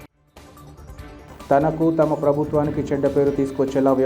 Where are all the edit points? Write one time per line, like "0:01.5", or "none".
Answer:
0:01.3